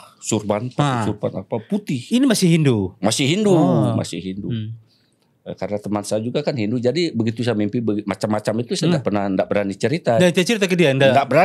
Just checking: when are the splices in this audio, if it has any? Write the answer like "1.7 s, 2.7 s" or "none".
none